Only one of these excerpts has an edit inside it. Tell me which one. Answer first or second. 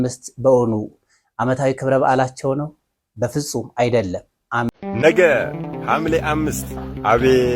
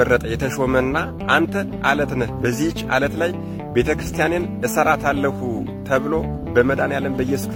first